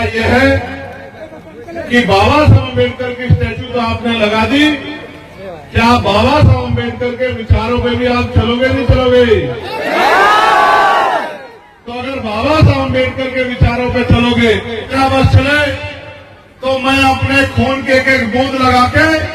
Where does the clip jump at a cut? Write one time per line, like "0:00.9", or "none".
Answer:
0:14.9